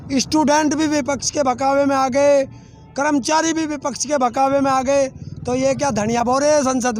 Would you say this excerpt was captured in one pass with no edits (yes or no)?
yes